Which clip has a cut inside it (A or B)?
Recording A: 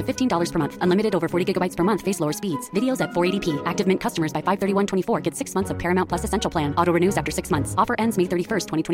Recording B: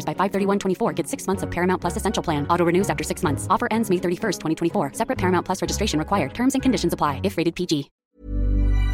B